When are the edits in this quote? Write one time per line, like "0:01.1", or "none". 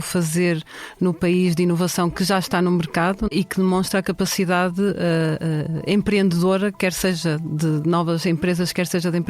0:03.3